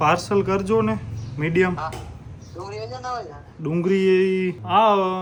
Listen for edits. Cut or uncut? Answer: uncut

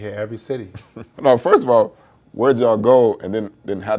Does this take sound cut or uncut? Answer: cut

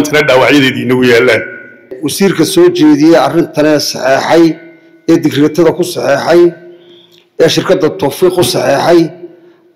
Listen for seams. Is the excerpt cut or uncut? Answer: cut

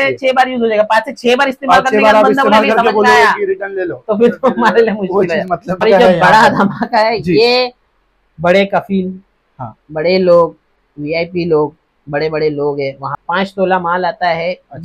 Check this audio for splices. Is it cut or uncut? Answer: cut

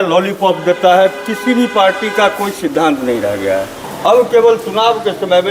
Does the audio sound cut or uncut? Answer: cut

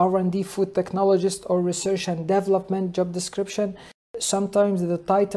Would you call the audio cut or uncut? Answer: uncut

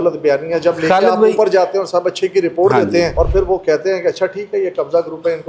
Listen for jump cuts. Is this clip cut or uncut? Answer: cut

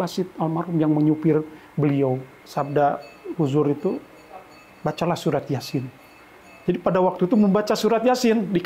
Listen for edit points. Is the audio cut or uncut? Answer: cut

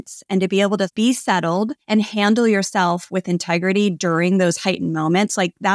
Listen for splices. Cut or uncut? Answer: cut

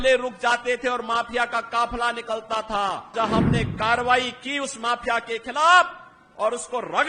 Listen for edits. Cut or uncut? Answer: cut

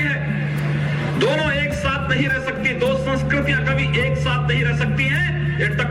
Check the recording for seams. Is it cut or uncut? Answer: uncut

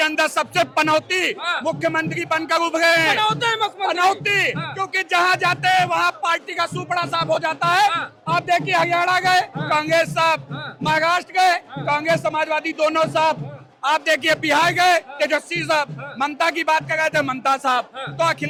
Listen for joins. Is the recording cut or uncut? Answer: uncut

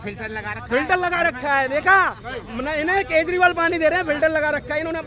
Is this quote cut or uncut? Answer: uncut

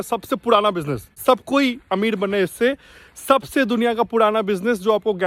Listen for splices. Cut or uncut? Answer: cut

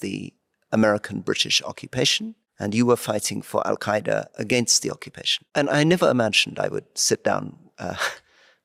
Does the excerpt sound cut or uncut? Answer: uncut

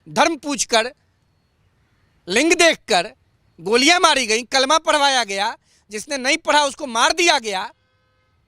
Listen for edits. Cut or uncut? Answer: uncut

